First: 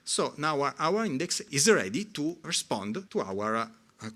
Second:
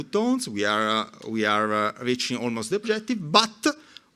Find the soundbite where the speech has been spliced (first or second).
first